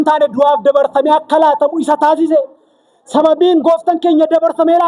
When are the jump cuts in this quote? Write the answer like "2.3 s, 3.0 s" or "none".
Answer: none